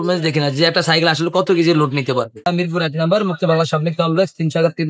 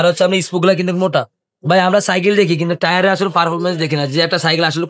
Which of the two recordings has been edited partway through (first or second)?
first